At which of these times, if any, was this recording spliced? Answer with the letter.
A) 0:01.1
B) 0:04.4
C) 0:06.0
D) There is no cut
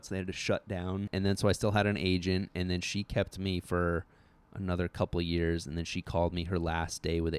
A